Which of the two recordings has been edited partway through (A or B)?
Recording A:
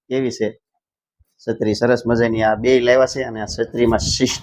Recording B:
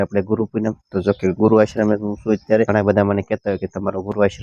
B